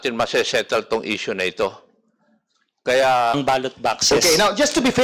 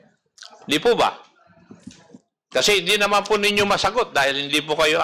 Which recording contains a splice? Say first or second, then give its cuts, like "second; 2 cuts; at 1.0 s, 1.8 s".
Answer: first; 1 cut; at 3.3 s